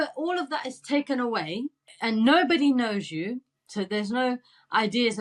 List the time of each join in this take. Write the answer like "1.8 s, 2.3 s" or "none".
1.9 s